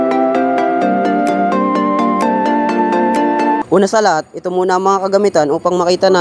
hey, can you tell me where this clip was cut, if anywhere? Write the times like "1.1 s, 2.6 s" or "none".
none